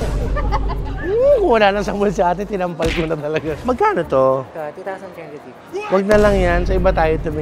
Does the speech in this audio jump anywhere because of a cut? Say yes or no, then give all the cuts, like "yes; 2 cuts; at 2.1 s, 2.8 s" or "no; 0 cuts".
yes; 1 cut; at 3.6 s